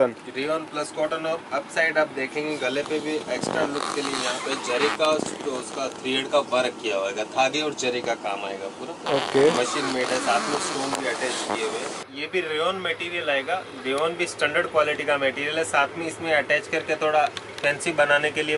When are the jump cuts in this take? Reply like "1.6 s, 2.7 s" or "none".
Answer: 12.0 s

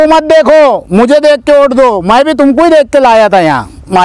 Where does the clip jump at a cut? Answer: none

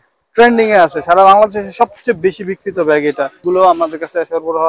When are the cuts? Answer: 3.4 s

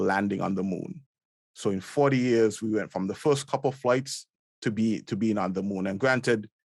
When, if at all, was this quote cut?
none

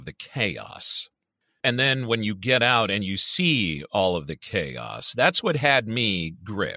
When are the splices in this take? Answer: 1.6 s

